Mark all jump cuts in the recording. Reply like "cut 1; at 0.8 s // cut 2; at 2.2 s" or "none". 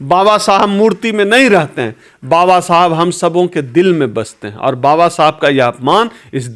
none